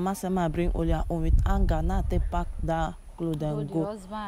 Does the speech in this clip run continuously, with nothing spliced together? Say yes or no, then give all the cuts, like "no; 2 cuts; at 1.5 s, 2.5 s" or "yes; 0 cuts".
yes; 0 cuts